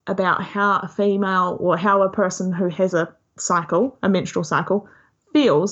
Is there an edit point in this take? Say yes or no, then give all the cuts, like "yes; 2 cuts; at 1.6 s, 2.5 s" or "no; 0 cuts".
no; 0 cuts